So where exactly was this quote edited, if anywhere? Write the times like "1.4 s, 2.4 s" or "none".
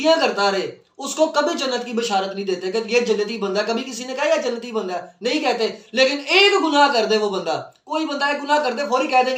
none